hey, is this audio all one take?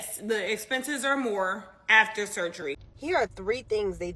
no; 1 cut; at 2.9 s

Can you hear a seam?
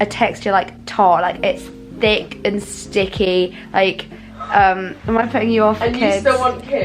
no; 0 cuts

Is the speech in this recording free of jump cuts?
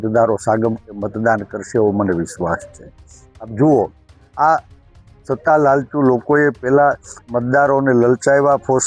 yes; 0 cuts

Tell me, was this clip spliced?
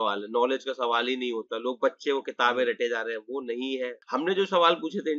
yes; 1 cut; at 4.0 s

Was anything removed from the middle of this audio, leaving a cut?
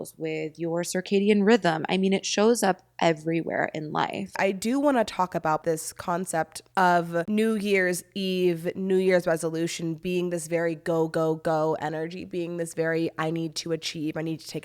yes; 4 cuts; at 4.4 s, 5.6 s, 6.6 s, 7.3 s

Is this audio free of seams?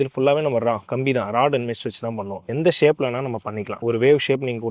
no; 2 cuts; at 2.4 s, 3.7 s

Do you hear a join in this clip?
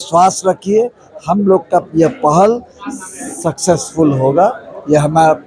no; 0 cuts

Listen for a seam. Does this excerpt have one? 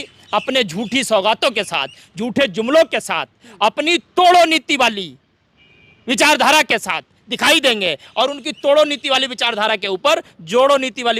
no; 0 cuts

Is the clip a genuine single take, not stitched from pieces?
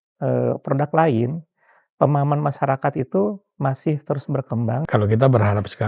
no; 1 cut; at 4.9 s

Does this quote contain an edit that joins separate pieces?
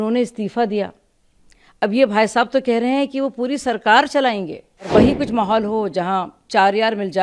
yes; 1 cut; at 4.9 s

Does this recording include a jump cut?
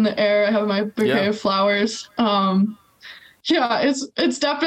no; 0 cuts

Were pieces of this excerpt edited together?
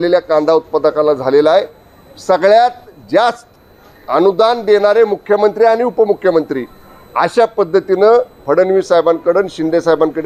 no; 0 cuts

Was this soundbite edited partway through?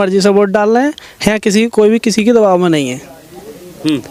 no; 0 cuts

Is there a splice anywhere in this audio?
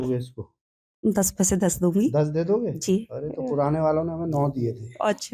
no; 0 cuts

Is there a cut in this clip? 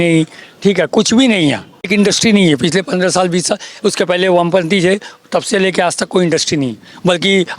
yes; 1 cut; at 1.9 s

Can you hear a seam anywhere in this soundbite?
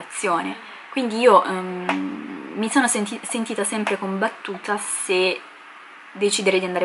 no; 0 cuts

